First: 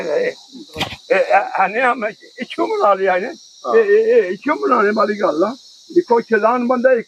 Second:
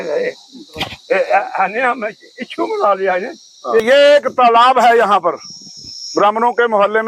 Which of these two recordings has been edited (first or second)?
second